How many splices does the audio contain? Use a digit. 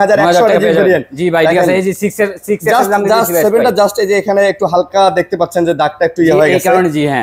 0